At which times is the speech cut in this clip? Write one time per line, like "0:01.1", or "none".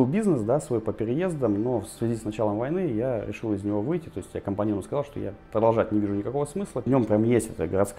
0:06.8